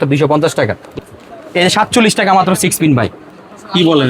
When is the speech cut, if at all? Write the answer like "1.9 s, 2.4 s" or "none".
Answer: 1.0 s

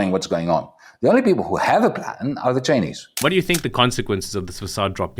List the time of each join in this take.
3.0 s

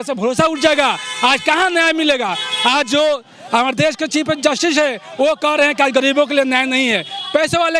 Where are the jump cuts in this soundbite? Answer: none

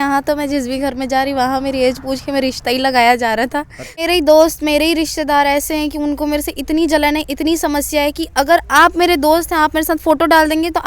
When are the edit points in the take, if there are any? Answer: 4.1 s

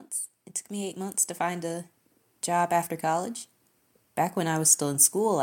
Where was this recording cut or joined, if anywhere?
none

